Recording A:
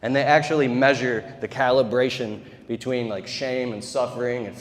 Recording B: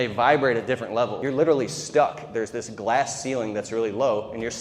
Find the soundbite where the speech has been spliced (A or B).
B